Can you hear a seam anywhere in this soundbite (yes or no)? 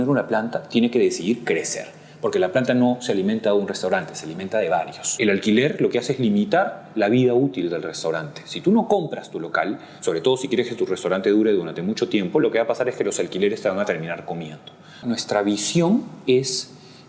yes